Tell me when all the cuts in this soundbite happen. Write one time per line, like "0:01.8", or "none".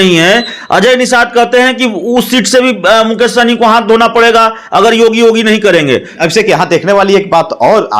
0:06.1